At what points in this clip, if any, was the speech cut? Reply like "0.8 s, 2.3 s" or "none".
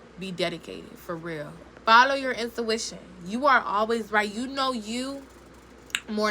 1.7 s